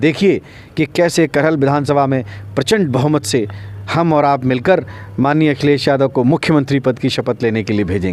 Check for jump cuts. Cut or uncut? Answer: uncut